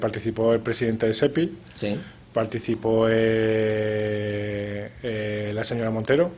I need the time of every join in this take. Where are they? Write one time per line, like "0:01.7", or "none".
none